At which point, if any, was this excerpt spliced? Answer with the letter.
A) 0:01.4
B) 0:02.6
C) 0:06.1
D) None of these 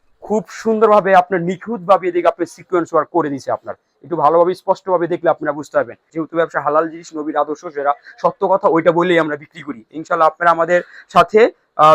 C